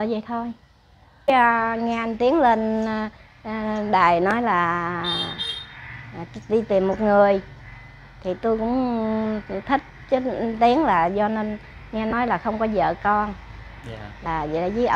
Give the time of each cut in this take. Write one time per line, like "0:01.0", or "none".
0:01.3